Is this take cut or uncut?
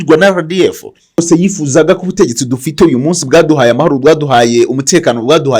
cut